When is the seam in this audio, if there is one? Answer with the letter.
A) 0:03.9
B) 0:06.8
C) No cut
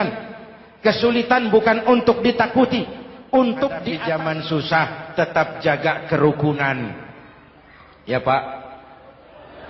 A